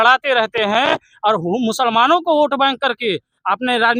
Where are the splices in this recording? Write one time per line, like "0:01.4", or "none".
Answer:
none

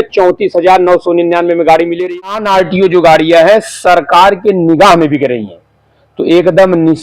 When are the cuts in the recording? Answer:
0:02.3

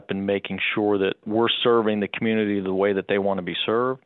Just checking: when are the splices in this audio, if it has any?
0:01.3

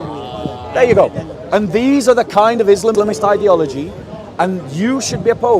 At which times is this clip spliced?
0:02.9

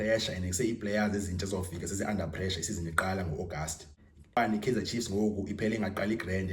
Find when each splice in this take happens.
0:04.4

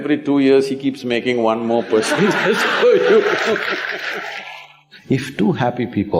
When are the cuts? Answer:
0:04.9

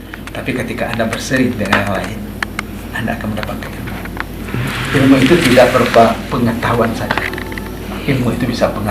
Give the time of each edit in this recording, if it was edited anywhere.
none

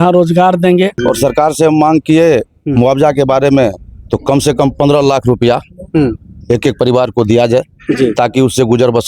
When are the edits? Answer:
0:01.0

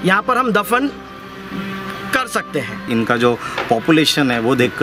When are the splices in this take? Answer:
0:02.9

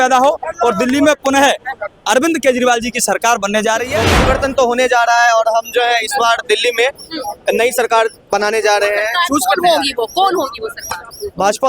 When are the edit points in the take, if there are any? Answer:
0:04.1

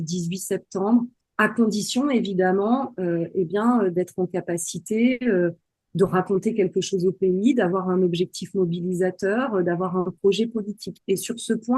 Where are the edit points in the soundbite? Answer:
0:01.2

